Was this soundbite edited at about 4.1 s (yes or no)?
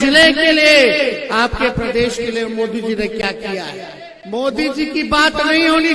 yes